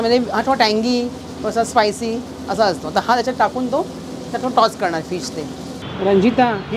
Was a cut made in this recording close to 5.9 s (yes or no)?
yes